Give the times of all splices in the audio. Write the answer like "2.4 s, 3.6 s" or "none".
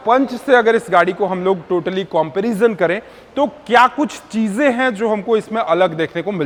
none